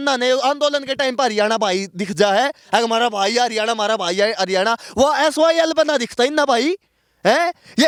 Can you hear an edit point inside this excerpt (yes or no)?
no